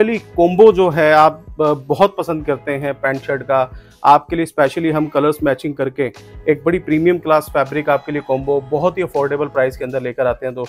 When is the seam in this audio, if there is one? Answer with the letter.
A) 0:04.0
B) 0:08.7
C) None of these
C